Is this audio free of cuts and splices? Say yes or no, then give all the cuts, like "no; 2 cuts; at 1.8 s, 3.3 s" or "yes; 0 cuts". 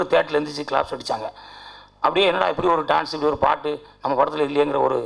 yes; 0 cuts